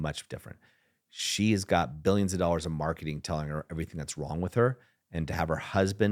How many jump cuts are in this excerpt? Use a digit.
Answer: 0